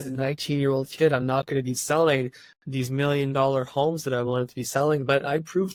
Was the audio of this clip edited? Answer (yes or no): no